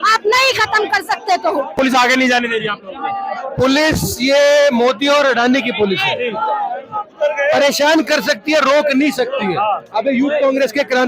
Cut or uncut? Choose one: cut